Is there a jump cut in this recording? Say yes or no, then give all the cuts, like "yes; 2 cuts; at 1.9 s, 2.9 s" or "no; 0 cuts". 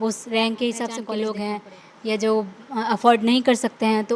yes; 1 cut; at 1.0 s